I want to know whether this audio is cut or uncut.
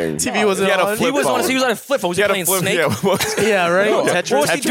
uncut